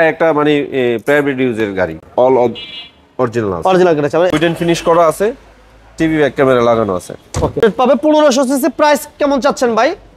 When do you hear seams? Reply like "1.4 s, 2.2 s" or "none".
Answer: 2.0 s, 4.3 s, 7.6 s